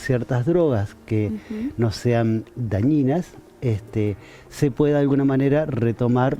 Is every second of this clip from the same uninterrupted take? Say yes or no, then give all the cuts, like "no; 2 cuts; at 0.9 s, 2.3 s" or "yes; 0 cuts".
yes; 0 cuts